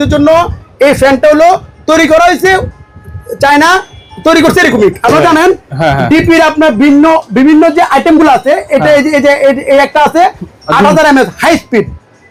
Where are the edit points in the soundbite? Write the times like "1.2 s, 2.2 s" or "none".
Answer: none